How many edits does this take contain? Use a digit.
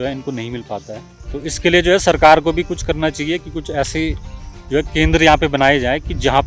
1